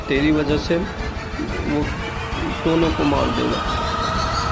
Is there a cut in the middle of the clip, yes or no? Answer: yes